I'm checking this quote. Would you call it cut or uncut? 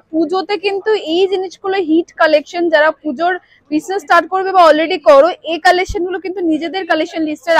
uncut